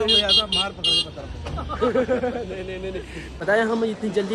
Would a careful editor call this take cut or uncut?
cut